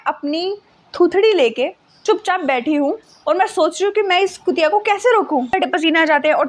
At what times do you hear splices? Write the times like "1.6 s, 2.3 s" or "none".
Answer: 5.5 s